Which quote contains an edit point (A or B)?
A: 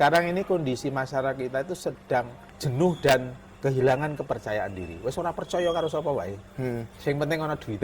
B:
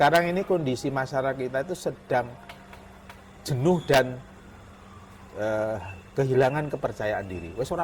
A